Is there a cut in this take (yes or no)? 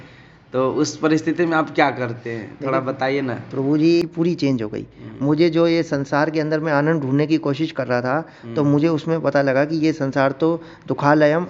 yes